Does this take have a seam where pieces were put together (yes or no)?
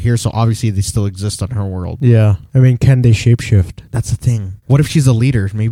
no